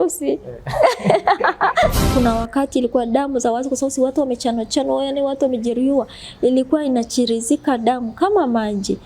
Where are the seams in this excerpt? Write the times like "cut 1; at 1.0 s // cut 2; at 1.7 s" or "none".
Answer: cut 1; at 2.1 s